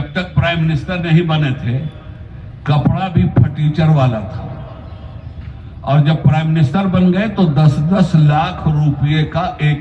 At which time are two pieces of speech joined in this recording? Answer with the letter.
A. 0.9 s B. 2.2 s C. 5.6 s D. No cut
D